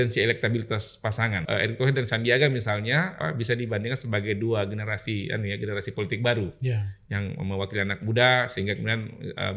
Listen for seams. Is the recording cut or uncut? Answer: cut